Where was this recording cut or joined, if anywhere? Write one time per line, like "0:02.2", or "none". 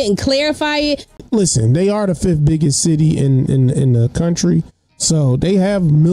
0:01.2